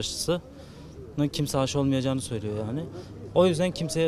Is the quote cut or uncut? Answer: uncut